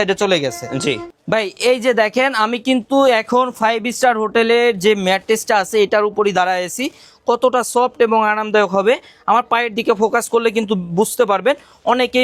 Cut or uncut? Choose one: cut